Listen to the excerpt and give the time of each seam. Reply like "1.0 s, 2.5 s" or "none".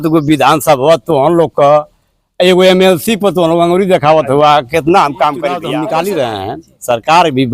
5.7 s